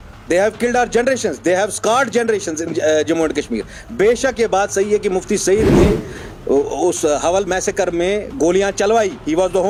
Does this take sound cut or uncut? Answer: uncut